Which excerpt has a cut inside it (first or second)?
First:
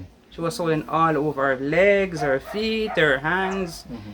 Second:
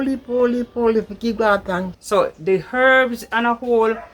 second